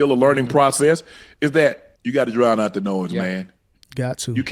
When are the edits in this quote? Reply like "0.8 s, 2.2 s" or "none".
1.9 s